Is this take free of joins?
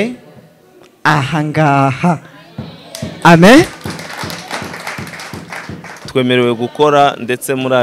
no; 1 cut; at 6.0 s

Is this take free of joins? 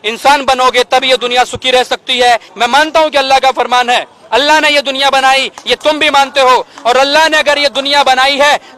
no; 1 cut; at 2.5 s

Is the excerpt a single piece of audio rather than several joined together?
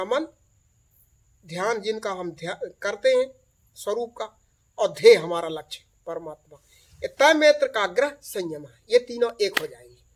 yes; 0 cuts

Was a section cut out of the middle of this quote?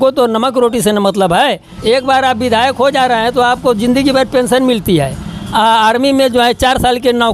yes; 1 cut; at 1.7 s

